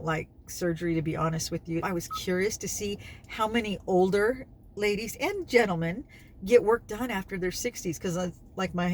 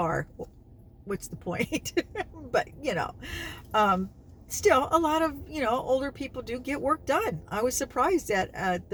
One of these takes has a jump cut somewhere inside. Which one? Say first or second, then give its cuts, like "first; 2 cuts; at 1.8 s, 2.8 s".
first; 1 cut; at 1.8 s